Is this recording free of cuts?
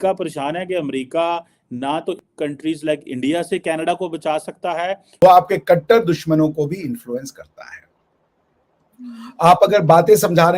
no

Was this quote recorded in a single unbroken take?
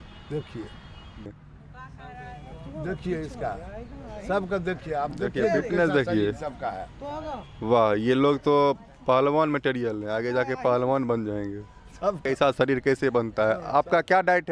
no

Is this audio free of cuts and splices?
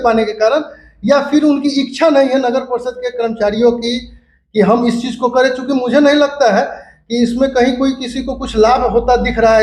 yes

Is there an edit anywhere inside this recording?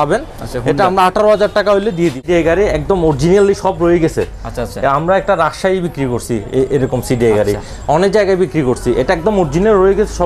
yes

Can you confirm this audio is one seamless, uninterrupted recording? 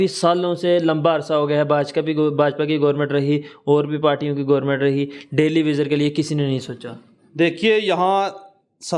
yes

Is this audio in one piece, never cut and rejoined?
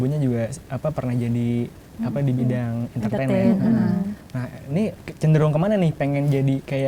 yes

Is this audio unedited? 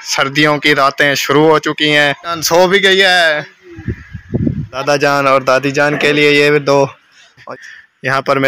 no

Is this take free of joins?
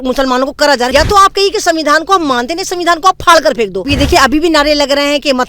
no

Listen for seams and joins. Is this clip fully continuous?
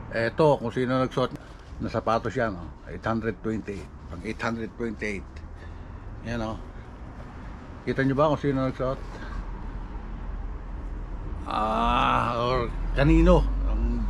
no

